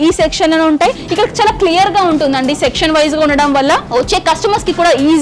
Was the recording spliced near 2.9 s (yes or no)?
no